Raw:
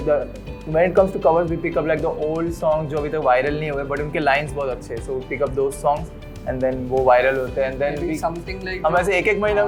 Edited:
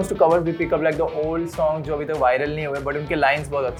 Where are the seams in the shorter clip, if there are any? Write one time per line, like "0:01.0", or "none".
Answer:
none